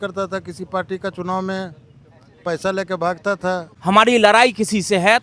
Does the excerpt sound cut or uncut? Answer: cut